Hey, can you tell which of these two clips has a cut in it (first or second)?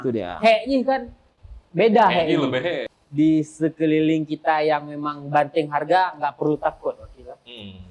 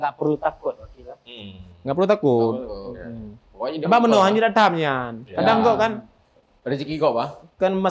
first